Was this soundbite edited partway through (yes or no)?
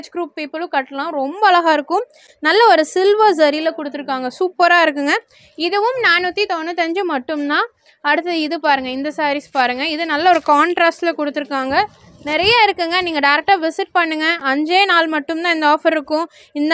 no